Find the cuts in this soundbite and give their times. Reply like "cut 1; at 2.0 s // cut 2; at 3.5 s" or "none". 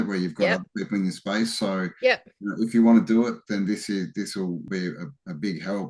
cut 1; at 4.7 s